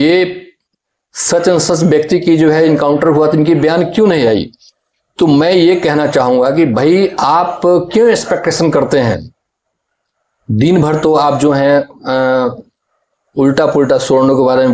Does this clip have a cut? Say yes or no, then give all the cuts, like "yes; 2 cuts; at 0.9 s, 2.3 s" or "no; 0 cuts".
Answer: no; 0 cuts